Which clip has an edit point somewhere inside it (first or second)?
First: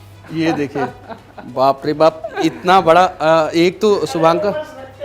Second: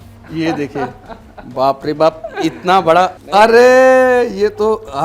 second